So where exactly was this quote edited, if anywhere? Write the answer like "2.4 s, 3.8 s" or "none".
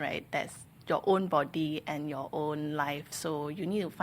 none